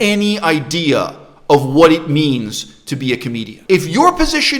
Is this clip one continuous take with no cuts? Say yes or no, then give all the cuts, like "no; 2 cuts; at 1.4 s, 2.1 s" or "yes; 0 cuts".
no; 1 cut; at 3.5 s